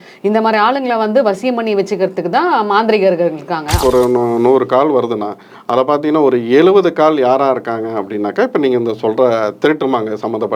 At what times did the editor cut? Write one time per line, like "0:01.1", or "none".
0:03.8